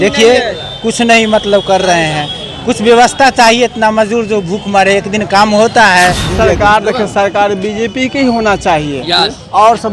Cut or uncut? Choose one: cut